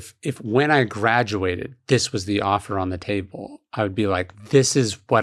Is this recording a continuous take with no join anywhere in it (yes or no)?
yes